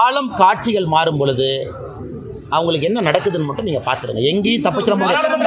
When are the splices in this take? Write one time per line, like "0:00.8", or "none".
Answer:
none

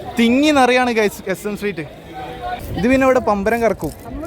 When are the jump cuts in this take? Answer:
0:02.8

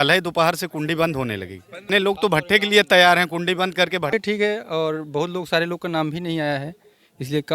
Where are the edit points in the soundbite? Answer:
0:01.8
0:04.1

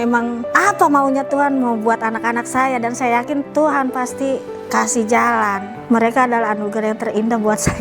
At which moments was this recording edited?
none

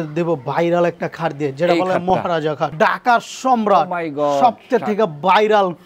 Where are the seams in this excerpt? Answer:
0:02.7

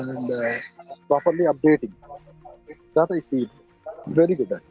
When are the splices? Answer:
none

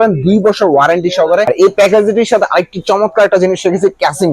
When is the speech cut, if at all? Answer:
0:01.5

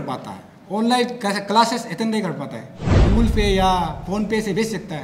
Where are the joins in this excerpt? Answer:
0:03.0

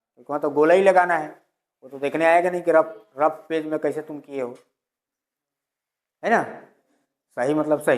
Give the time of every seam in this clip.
none

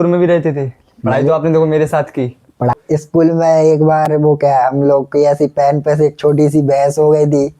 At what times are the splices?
0:02.7

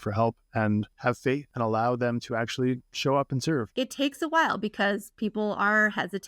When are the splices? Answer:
0:01.4
0:03.7

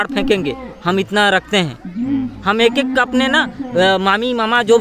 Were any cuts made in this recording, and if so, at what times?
none

